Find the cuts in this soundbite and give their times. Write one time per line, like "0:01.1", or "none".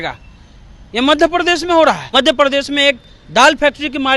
0:02.0